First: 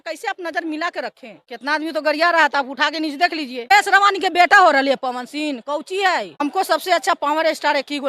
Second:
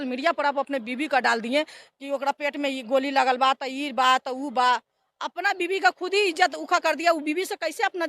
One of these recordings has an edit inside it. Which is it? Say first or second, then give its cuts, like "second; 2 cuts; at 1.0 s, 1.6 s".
first; 3 cuts; at 1.4 s, 3.7 s, 6.4 s